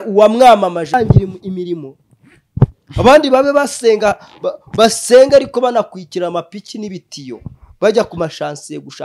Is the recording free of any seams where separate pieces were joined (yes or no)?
no